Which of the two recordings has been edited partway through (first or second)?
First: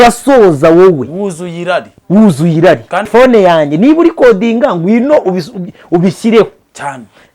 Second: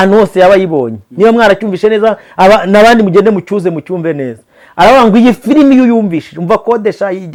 first